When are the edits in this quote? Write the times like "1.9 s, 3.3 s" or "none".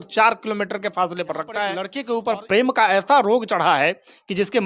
1.9 s